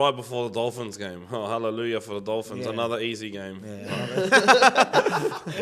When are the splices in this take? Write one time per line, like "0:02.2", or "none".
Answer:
none